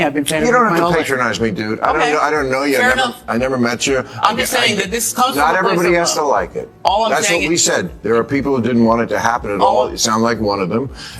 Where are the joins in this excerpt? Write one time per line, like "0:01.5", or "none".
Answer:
none